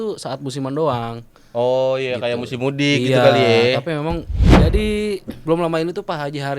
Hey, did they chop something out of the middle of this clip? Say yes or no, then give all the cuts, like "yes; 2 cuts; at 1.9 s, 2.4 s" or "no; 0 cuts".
yes; 1 cut; at 4.6 s